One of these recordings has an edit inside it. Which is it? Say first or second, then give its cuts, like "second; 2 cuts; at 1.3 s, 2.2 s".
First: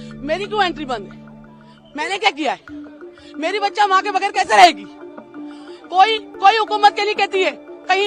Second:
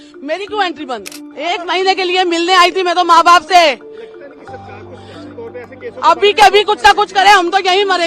second; 1 cut; at 1.2 s